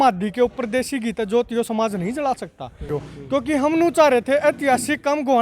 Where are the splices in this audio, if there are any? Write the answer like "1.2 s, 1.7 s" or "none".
2.9 s